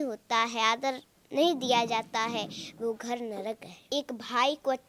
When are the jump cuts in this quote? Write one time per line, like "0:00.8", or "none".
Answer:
0:03.8